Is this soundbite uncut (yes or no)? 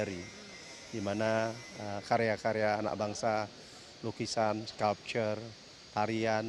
yes